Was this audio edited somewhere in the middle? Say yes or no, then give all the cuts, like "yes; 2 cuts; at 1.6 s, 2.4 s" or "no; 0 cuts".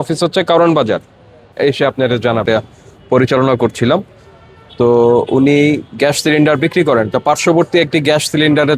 yes; 2 cuts; at 1.5 s, 2.4 s